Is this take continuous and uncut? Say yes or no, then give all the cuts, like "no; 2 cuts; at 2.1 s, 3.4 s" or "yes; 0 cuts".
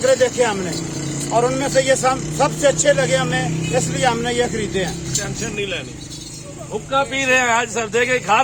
no; 1 cut; at 5.1 s